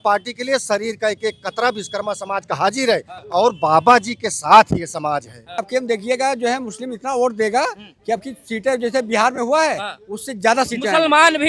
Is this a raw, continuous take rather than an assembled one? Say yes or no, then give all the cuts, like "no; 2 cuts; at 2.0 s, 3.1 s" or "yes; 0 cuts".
no; 2 cuts; at 3.2 s, 5.6 s